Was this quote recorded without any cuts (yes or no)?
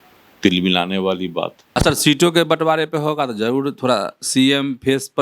no